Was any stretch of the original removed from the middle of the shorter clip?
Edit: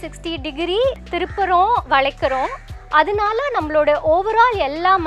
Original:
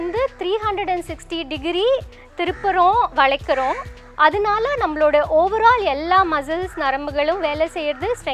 yes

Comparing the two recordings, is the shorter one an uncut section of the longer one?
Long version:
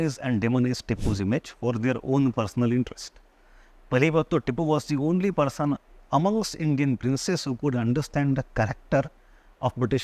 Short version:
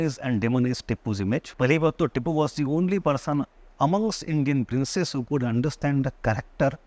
no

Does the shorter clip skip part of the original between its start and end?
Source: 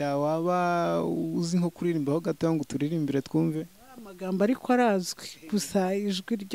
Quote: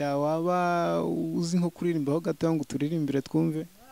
no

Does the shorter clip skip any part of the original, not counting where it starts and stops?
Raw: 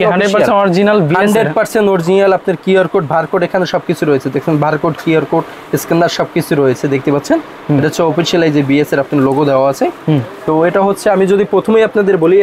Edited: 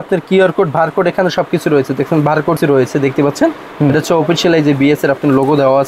yes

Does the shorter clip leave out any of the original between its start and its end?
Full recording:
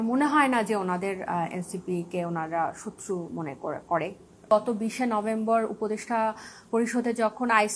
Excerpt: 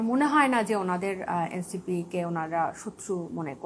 no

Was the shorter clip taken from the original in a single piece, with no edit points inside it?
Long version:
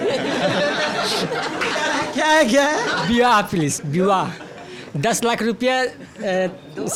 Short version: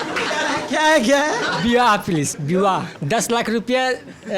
no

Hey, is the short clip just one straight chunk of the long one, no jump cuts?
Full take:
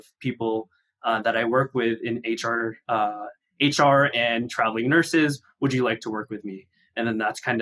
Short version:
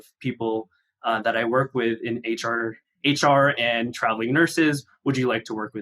no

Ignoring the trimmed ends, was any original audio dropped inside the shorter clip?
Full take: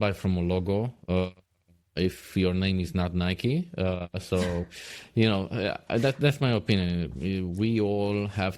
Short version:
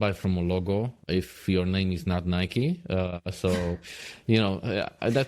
yes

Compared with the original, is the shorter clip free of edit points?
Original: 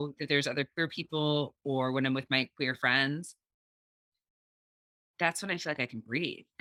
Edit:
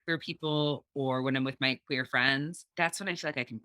no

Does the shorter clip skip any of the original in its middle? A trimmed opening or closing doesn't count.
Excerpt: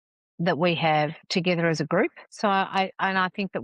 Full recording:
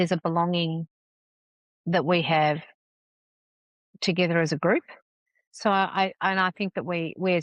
yes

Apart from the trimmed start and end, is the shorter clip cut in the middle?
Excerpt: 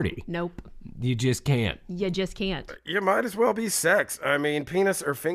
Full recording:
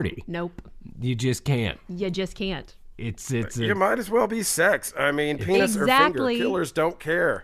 yes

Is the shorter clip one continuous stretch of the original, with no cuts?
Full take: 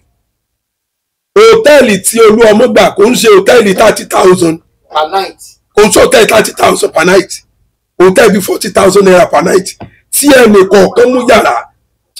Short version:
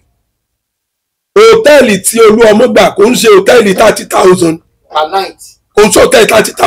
yes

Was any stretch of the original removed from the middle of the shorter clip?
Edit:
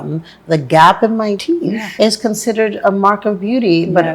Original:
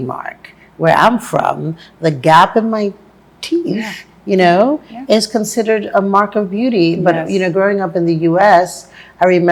yes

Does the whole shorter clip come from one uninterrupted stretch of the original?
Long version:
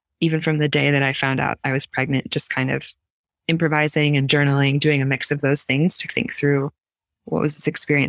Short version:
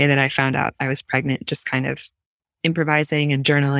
yes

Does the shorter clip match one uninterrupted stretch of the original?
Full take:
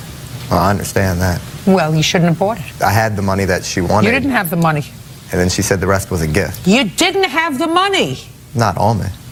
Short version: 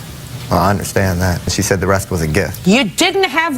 no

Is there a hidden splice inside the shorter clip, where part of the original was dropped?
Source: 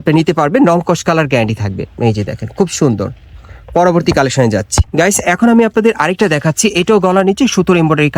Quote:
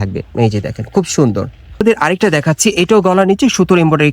yes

